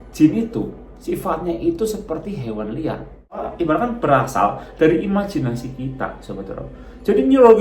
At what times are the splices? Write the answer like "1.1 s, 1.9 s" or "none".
3.5 s